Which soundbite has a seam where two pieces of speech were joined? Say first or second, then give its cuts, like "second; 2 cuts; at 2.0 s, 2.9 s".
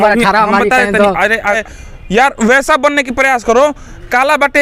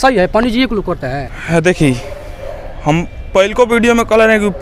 first; 1 cut; at 1.6 s